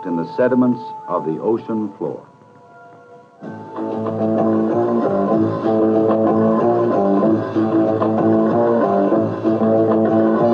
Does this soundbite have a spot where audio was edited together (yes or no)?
no